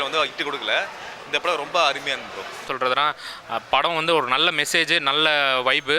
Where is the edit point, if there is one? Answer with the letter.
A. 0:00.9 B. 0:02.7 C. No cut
B